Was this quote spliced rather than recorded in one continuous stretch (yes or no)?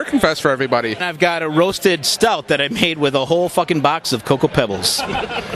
yes